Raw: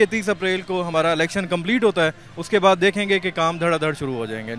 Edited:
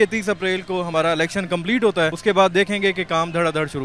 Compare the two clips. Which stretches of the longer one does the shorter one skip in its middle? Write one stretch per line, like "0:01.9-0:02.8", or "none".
0:02.2-0:02.4